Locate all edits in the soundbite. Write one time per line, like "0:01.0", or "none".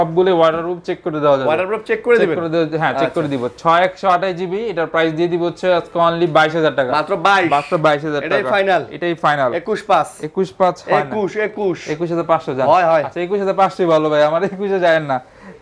none